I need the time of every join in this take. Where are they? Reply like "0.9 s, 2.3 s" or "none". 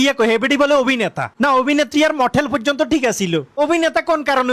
none